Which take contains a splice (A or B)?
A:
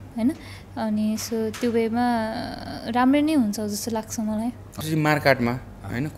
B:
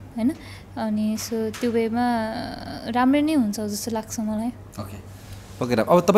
A